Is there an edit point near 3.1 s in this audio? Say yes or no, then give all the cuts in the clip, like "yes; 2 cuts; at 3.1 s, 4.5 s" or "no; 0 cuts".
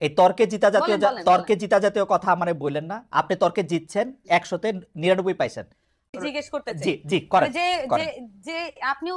no; 1 cut; at 6.0 s